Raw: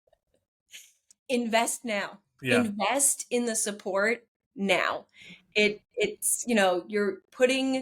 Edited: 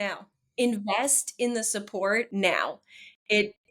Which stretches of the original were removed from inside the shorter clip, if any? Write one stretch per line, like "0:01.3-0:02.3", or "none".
0:04.2-0:04.5

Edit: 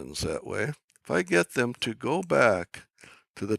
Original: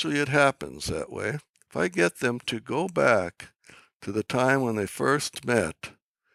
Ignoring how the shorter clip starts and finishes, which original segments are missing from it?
none

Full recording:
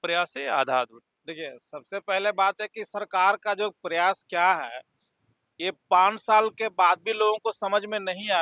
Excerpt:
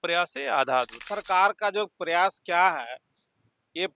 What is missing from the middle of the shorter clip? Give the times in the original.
0:01.1-0:02.9

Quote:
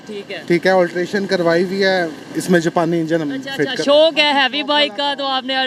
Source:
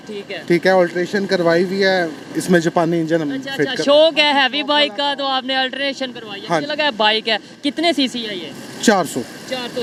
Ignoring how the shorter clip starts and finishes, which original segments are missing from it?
none

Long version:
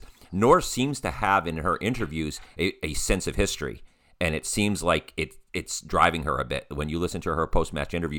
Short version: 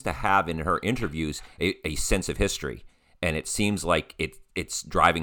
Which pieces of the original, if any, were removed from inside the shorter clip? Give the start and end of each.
none

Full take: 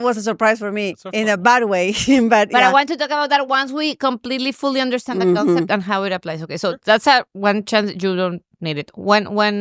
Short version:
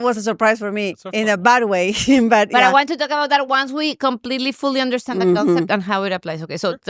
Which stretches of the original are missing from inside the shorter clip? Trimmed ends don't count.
none

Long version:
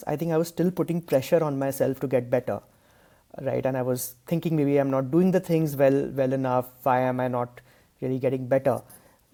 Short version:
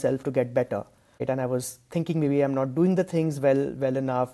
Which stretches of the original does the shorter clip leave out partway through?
0:03.0-0:03.6

